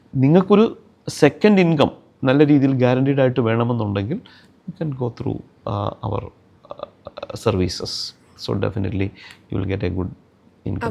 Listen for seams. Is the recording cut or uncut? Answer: uncut